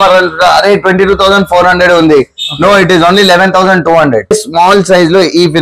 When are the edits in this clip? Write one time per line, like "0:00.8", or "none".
0:04.3